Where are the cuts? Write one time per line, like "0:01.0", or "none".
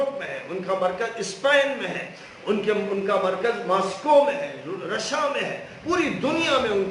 none